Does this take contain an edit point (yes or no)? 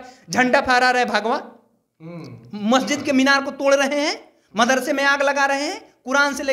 no